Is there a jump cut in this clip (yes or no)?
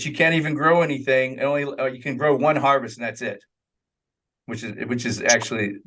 no